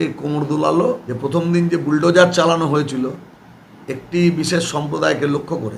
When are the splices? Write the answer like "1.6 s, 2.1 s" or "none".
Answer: 1.1 s